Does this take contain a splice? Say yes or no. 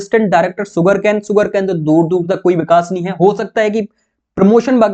no